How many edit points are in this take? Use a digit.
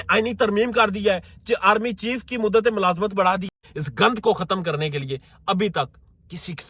1